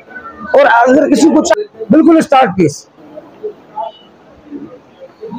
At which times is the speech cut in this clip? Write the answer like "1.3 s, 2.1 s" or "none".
1.5 s